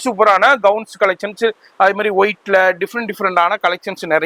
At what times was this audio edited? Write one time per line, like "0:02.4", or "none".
none

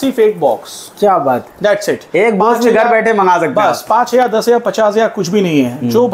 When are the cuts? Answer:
none

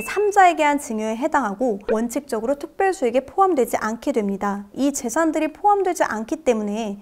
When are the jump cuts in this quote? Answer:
0:01.8
0:04.7

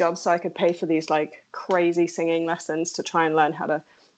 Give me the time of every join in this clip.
none

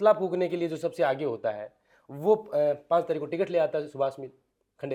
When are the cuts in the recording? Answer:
none

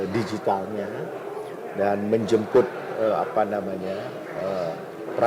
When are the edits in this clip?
none

